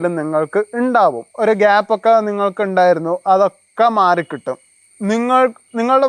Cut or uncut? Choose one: cut